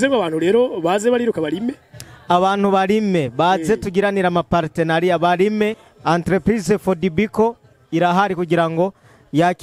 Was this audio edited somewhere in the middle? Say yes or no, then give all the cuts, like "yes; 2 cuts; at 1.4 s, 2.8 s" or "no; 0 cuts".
yes; 1 cut; at 5.9 s